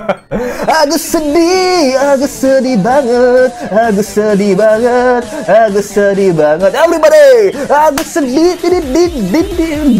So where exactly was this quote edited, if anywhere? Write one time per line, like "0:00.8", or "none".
none